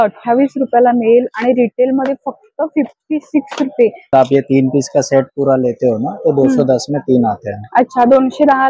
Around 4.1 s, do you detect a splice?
yes; 1 cut; at 4.1 s

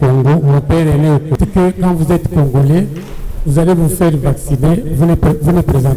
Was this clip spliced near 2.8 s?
no; 1 cut; at 1.3 s

